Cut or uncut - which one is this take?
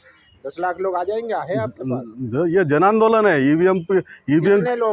uncut